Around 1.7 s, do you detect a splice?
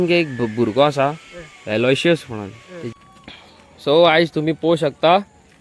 no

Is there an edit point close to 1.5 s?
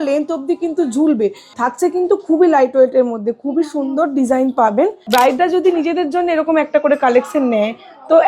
yes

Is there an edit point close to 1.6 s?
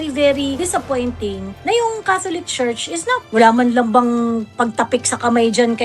no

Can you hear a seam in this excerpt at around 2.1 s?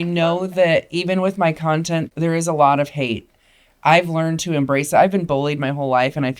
yes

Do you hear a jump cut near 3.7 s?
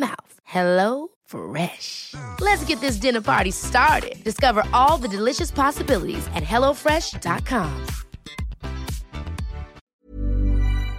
no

